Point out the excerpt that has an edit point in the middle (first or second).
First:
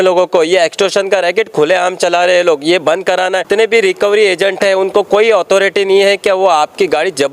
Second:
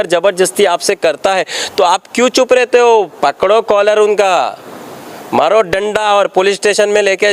first